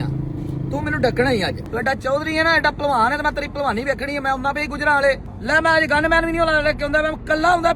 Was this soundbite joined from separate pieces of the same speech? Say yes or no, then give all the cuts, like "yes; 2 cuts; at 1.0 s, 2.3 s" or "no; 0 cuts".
yes; 2 cuts; at 1.6 s, 5.3 s